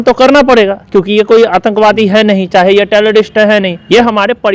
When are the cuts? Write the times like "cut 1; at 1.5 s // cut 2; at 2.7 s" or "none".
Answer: none